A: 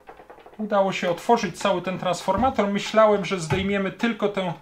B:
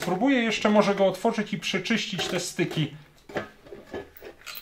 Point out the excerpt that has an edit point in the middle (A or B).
B